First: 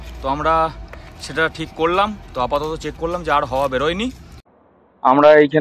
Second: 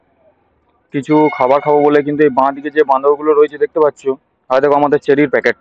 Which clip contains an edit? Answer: first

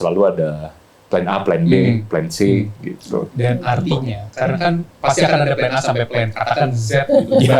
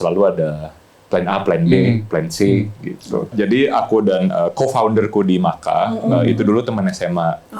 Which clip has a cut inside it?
second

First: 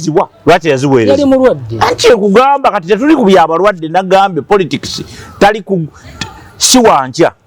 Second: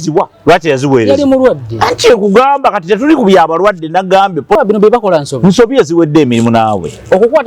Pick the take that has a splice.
second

